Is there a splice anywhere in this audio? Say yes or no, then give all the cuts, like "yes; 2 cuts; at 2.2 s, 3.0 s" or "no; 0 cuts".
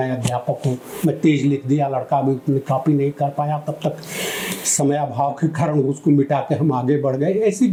no; 0 cuts